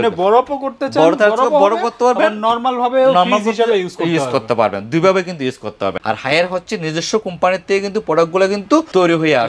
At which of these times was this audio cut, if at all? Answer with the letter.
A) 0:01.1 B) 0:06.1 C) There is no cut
B